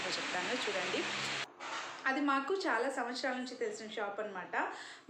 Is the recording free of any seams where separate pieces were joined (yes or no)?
no